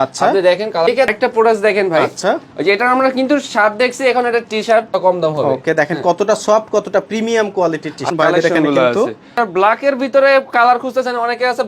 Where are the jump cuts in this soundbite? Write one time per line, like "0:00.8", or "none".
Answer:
0:00.9
0:04.9
0:08.0

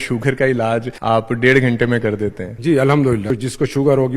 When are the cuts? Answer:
0:00.9
0:02.5
0:03.3

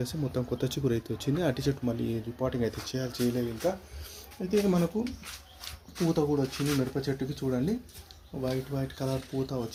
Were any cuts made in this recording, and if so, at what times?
none

